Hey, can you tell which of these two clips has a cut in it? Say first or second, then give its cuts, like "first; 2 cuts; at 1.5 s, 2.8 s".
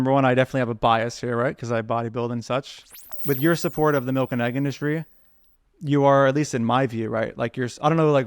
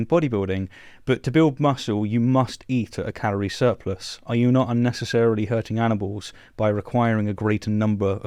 first; 1 cut; at 3.1 s